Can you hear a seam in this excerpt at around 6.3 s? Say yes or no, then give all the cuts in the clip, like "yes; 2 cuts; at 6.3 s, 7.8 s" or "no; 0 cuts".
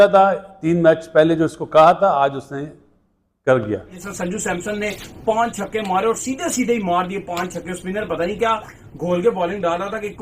no; 1 cut; at 4.1 s